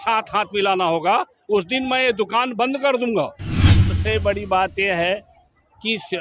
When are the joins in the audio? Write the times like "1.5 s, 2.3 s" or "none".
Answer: 3.9 s